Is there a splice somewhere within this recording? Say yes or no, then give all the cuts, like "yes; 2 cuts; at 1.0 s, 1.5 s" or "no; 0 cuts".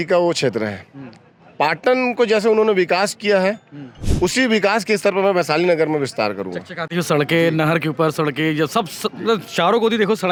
no; 0 cuts